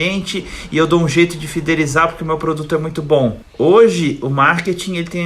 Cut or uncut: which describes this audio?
cut